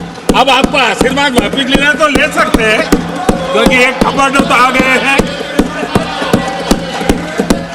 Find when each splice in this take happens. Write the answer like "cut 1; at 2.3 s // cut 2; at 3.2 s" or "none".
none